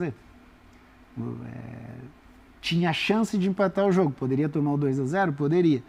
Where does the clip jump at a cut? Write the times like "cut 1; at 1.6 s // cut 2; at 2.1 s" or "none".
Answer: none